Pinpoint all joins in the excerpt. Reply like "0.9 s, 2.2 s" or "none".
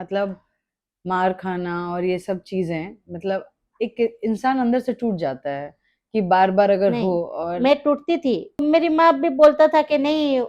8.6 s